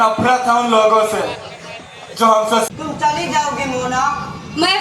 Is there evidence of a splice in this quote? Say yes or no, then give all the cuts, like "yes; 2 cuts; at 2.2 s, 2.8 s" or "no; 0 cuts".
yes; 1 cut; at 2.7 s